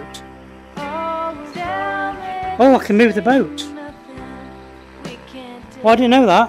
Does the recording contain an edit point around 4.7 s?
no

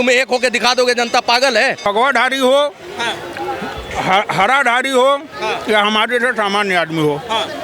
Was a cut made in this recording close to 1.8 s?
yes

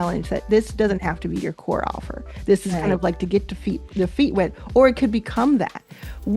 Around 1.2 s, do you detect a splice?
no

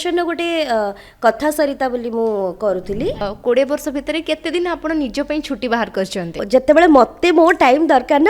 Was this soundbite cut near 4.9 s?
no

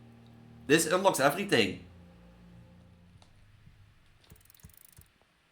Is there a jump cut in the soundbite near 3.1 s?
yes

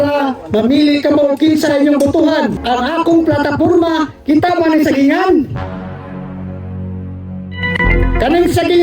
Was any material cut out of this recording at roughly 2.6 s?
yes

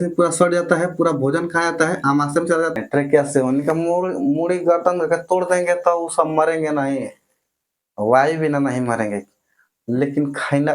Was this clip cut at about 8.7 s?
no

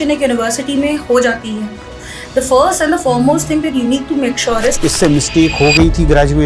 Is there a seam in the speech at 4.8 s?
yes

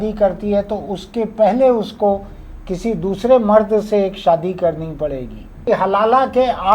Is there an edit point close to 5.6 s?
yes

